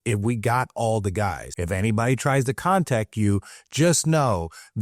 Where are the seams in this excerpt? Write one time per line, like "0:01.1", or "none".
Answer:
0:01.5